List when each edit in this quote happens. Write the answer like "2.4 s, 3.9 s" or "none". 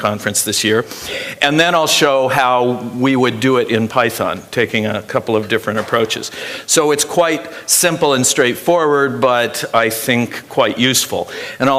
none